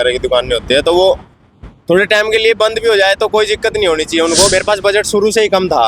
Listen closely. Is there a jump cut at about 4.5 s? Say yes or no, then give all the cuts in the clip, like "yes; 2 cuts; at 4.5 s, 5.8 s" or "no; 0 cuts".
yes; 1 cut; at 4.5 s